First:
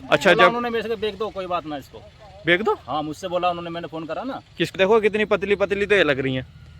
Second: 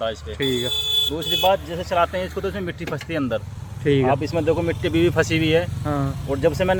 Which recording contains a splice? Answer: first; 1 cut; at 4.7 s

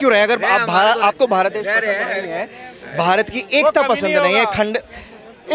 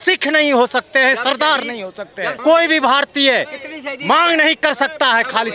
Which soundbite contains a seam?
second; 1 cut; at 2.4 s

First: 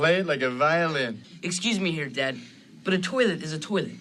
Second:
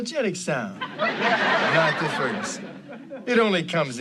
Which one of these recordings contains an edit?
first; 1 cut; at 1.2 s

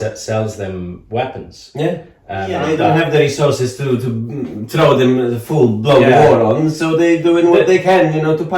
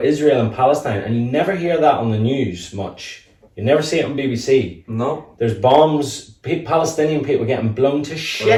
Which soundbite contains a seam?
first; 1 cut; at 2.6 s

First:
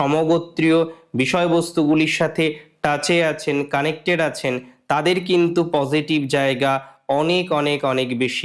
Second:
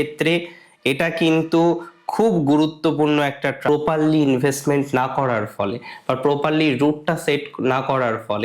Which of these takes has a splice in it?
second; 1 cut; at 3.7 s

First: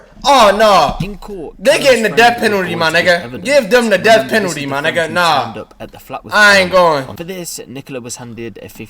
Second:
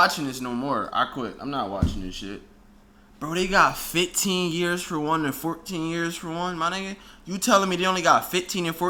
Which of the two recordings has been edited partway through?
first; 1 cut; at 7.1 s

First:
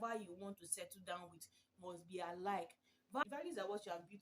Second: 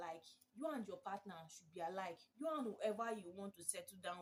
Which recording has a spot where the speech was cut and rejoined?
first; 1 cut; at 3.3 s

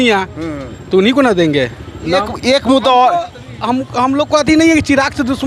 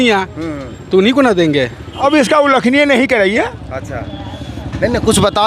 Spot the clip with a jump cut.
second; 1 cut; at 1.9 s

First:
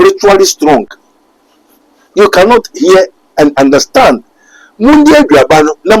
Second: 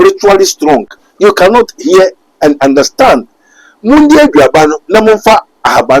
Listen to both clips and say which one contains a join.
second; 1 cut; at 1.0 s

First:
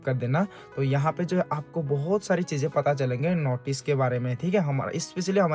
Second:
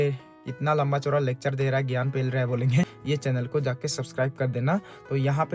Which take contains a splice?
second; 1 cut; at 2.9 s

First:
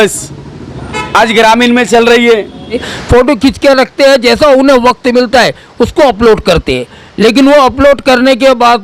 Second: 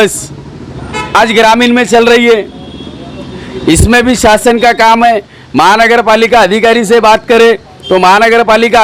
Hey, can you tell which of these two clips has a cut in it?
first; 1 cut; at 2.9 s

